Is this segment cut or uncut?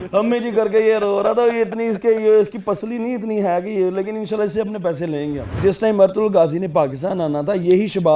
cut